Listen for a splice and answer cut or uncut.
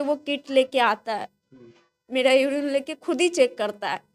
uncut